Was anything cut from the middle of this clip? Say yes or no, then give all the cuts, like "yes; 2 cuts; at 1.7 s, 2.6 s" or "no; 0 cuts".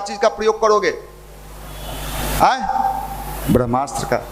no; 0 cuts